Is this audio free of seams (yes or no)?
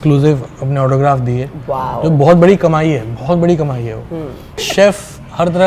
no